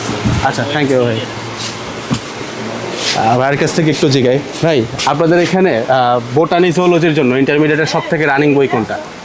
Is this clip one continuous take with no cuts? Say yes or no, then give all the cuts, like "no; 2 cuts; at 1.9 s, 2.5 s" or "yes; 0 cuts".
yes; 0 cuts